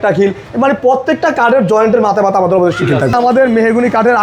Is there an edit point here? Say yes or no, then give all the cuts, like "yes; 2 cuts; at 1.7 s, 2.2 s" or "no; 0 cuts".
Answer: yes; 1 cut; at 3.1 s